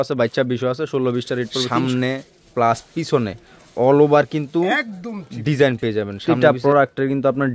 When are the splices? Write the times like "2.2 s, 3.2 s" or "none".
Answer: 1.7 s, 6.2 s

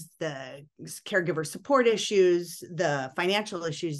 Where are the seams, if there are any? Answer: none

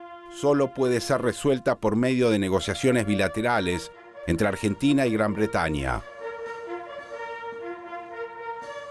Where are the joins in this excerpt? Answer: none

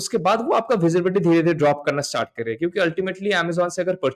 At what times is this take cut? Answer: none

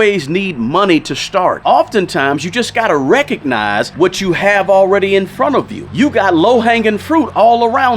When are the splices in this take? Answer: 1.6 s, 3.9 s, 5.8 s

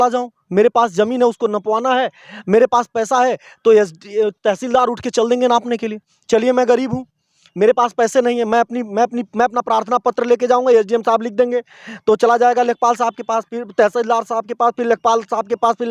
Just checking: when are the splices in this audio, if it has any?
none

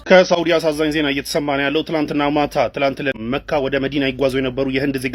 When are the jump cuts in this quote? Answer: 3.2 s

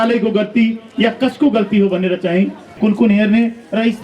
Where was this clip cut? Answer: 2.7 s

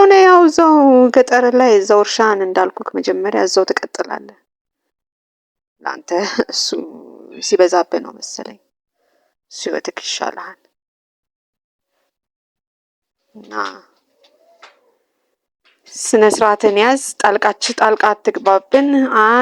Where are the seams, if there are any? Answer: none

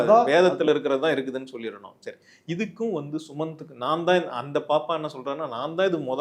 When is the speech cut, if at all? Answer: none

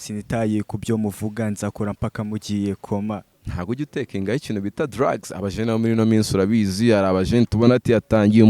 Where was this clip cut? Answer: 3.3 s

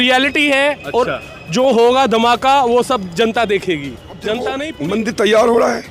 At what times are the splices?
4.7 s

